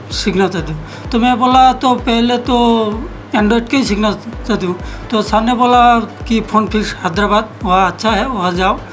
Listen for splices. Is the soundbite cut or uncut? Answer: uncut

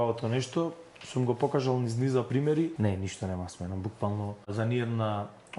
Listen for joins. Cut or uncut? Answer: cut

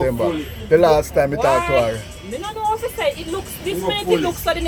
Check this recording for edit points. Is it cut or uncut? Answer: uncut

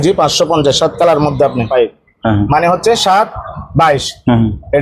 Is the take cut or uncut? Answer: cut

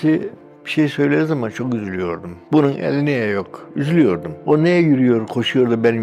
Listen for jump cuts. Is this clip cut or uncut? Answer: uncut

